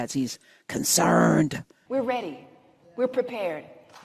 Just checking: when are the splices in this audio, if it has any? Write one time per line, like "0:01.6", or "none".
0:01.7